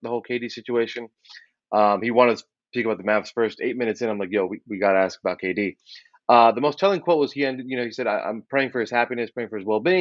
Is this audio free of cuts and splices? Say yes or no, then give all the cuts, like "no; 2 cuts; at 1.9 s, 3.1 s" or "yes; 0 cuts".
yes; 0 cuts